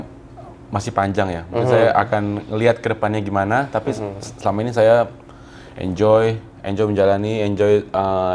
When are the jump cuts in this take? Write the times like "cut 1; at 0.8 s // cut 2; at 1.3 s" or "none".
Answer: none